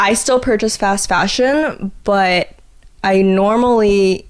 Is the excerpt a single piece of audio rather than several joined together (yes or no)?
yes